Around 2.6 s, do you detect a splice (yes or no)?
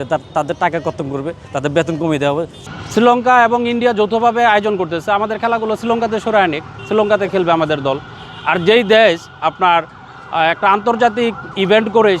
yes